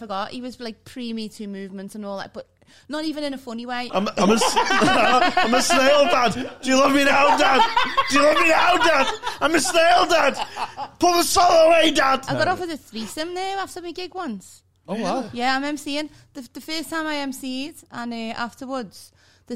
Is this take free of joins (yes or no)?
no